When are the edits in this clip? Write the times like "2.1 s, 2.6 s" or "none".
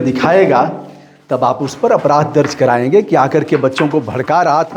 none